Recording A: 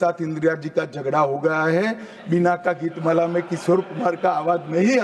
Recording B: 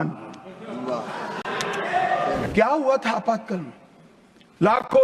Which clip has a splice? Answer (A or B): B